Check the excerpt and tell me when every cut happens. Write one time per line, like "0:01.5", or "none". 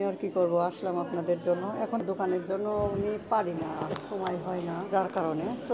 0:02.0
0:04.9